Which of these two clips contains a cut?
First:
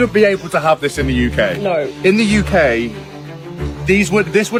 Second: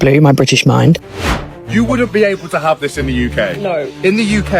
second; 1 cut; at 1.0 s

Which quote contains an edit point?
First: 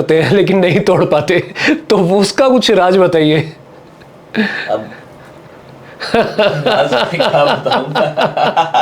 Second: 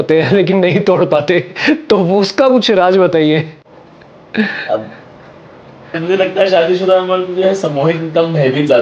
second; 1 cut; at 6.0 s

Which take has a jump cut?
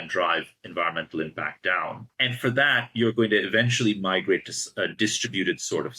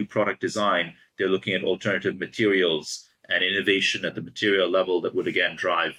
first; 1 cut; at 2.1 s

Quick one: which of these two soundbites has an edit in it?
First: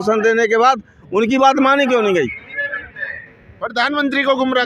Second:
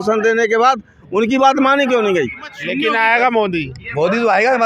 second; 1 cut; at 2.5 s

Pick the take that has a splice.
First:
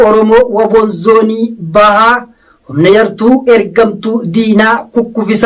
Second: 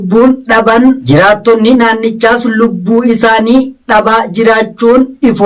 second; 1 cut; at 1.0 s

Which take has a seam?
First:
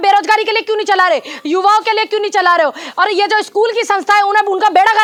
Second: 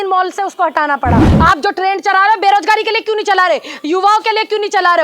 second; 1 cut; at 1.3 s

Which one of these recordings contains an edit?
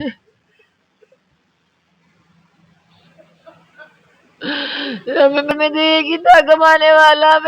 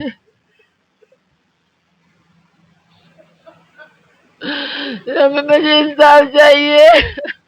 first; 1 cut; at 5.5 s

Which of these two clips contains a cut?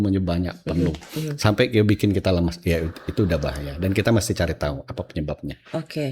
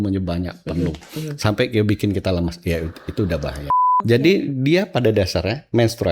second; 1 cut; at 3.7 s

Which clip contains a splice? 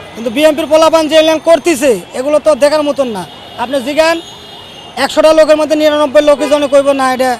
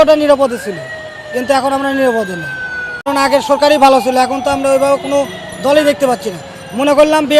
second; 1 cut; at 3.0 s

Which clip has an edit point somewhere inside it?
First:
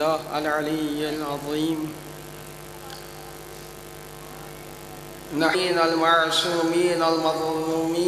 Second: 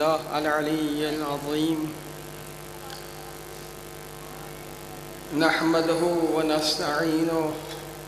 second; 1 cut; at 5.5 s

